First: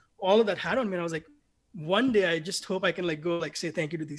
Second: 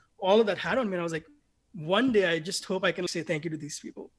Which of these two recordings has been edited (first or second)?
second